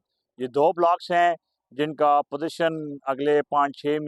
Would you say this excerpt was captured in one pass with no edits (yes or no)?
yes